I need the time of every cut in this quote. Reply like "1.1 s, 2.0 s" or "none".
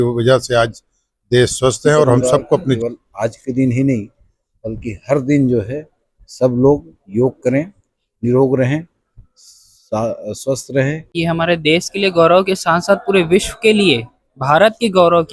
2.8 s, 11.0 s